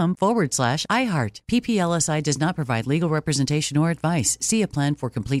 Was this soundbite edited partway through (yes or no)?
no